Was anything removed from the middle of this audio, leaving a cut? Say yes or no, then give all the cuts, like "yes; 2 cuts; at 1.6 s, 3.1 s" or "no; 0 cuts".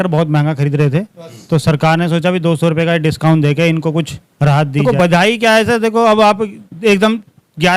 yes; 1 cut; at 4.8 s